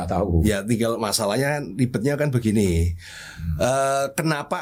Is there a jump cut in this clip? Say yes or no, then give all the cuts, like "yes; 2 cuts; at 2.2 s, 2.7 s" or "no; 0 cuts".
no; 0 cuts